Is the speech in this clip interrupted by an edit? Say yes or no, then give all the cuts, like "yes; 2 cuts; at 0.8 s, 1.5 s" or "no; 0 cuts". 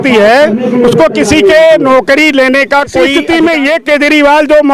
yes; 1 cut; at 3.1 s